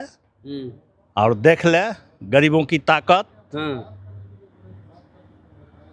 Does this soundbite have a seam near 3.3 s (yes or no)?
no